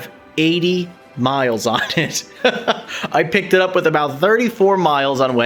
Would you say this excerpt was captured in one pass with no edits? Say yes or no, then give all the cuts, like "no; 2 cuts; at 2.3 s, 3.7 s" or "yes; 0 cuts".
yes; 0 cuts